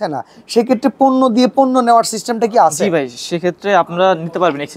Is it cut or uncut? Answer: uncut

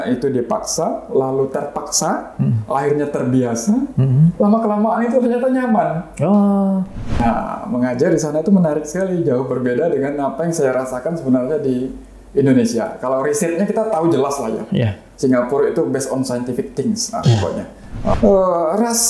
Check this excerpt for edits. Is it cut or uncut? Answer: cut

